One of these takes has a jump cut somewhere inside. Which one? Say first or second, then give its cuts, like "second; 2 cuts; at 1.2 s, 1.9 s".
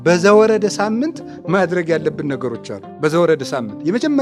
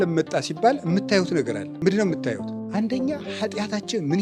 second; 2 cuts; at 1.6 s, 2.5 s